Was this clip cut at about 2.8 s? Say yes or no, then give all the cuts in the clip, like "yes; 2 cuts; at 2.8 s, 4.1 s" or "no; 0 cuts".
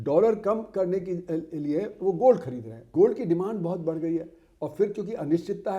yes; 1 cut; at 2.8 s